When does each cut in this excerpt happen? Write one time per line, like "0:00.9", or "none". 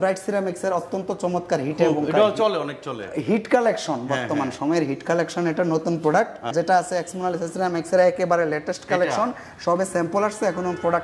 0:06.5